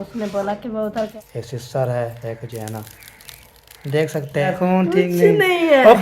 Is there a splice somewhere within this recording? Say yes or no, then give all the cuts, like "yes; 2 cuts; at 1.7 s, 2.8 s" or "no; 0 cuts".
yes; 2 cuts; at 1.1 s, 4.6 s